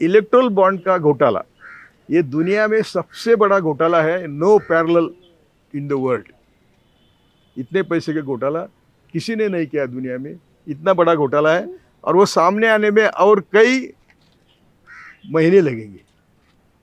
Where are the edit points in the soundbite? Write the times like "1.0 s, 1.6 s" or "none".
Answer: none